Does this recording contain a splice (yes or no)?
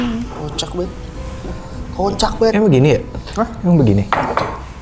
no